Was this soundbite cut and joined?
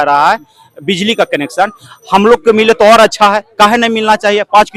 no; 0 cuts

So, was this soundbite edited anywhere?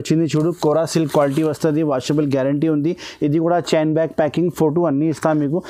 no; 0 cuts

